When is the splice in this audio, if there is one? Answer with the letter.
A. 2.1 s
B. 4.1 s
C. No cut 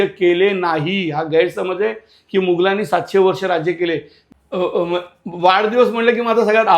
B